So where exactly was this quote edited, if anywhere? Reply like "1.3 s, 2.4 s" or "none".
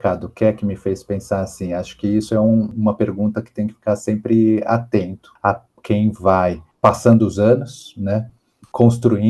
2.7 s, 5.2 s